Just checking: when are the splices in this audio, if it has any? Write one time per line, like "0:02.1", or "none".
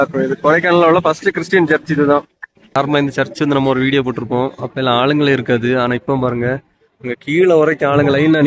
0:02.7

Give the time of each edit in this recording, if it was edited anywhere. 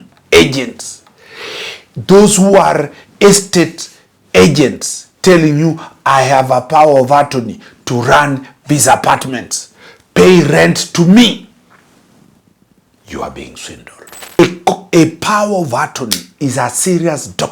0:14.4

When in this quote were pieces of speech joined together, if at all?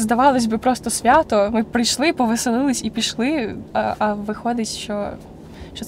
0:03.6

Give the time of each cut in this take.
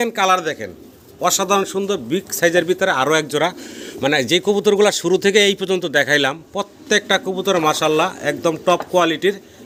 none

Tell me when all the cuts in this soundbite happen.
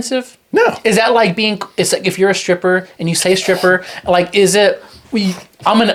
none

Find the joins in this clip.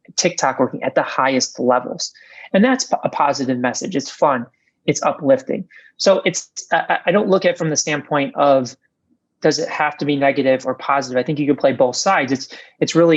none

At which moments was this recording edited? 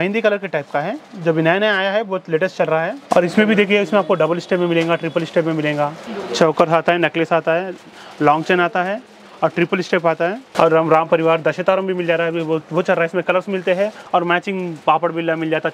0:03.0
0:06.0
0:10.5
0:14.0

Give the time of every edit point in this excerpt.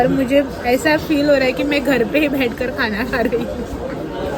none

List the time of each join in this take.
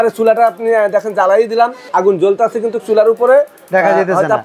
0:01.8

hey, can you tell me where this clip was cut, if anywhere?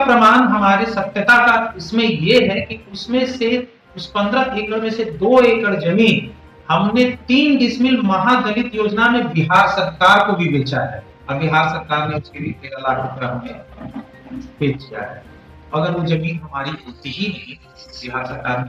none

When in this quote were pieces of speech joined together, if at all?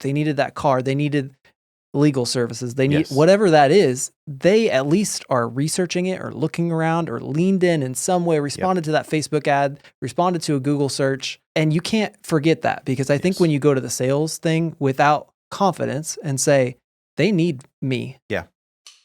0:11.3
0:17.7

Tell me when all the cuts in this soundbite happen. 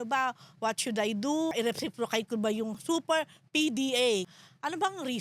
0:01.5
0:02.8
0:04.3

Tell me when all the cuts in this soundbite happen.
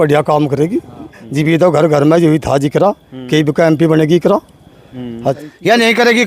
0:01.2
0:05.4

